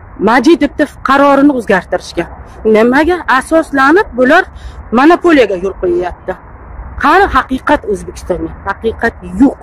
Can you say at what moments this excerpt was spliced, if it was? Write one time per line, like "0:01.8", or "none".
none